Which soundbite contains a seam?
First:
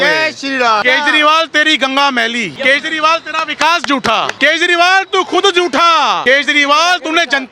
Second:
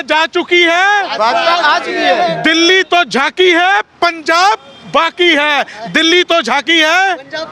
first; 4 cuts; at 0.8 s, 2.5 s, 4.3 s, 6.2 s

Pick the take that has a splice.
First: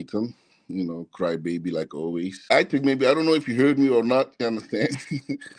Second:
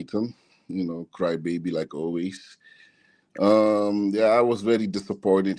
first; 1 cut; at 2.5 s

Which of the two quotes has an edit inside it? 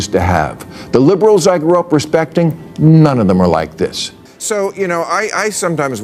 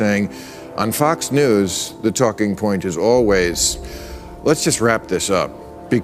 first; 1 cut; at 4.1 s

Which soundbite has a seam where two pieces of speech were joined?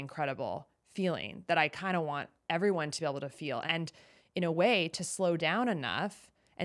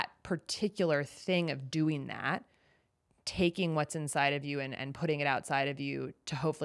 first; 1 cut; at 3.7 s

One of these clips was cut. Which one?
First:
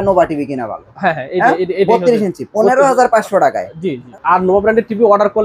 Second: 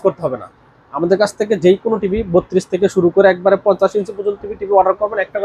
first; 1 cut; at 4.1 s

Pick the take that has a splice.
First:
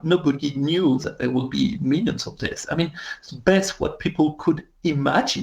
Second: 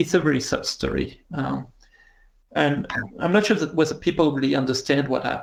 first; 1 cut; at 1.1 s

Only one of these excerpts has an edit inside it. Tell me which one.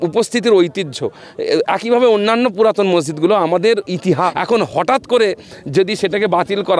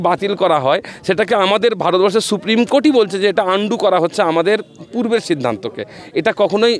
first; 1 cut; at 4.3 s

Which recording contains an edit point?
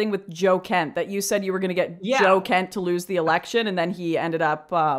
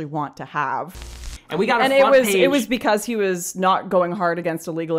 second; 1 cut; at 1.3 s

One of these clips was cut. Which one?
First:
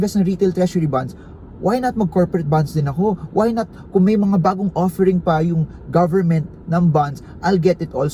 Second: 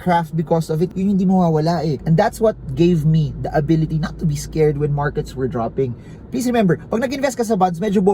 second; 1 cut; at 2.0 s

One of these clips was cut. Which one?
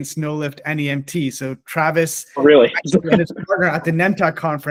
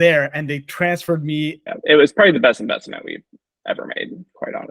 second; 1 cut; at 1.6 s

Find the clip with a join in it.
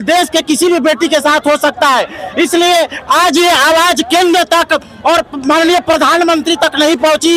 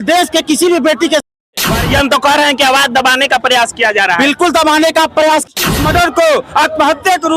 second; 2 cuts; at 1.3 s, 5.5 s

